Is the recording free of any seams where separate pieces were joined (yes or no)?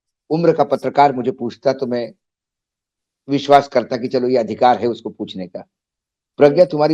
yes